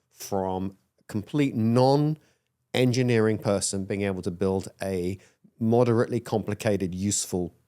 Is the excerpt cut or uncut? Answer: uncut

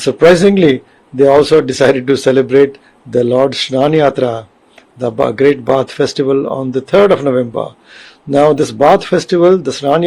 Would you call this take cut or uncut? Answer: uncut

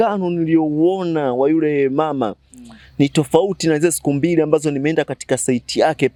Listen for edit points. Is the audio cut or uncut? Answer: uncut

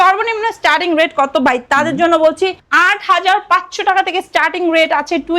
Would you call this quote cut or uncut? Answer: uncut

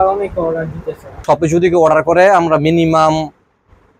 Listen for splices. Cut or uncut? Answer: cut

